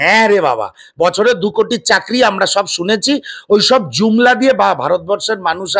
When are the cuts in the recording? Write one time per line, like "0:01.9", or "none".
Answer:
none

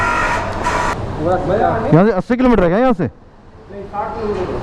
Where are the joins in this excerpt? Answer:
0:00.9

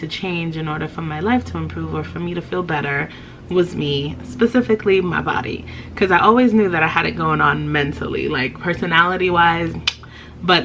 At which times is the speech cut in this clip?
none

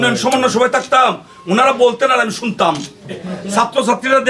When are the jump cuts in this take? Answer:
0:03.3

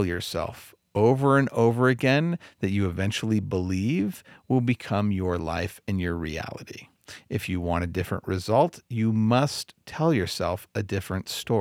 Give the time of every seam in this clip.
none

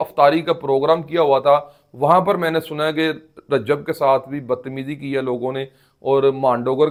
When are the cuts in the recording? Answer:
none

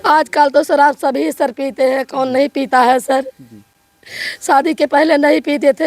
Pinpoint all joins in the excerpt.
none

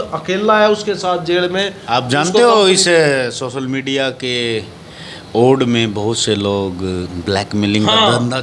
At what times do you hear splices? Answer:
none

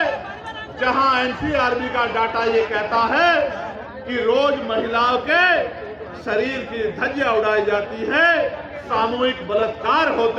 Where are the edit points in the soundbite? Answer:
none

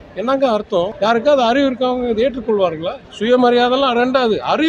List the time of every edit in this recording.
0:00.9
0:03.0

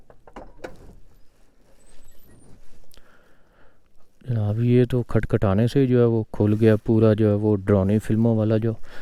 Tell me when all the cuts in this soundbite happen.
none

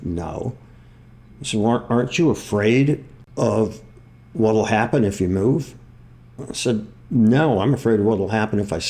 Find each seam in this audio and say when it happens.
0:03.2

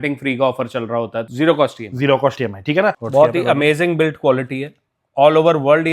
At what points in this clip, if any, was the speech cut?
0:01.2
0:03.0

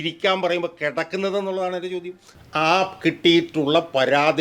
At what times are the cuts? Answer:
0:02.3

